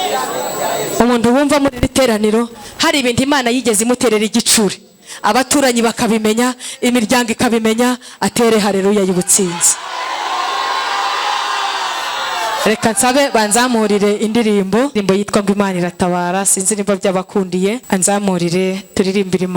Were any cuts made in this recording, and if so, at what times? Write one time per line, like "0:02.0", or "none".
0:14.9
0:17.8